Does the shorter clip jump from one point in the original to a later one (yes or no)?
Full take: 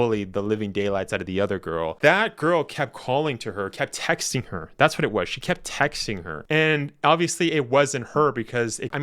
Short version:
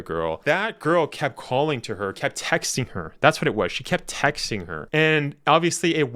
no